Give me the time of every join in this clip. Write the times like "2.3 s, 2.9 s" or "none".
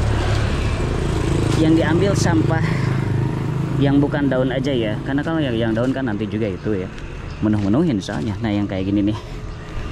none